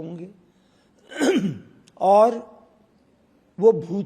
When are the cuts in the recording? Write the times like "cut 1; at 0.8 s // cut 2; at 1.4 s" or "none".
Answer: none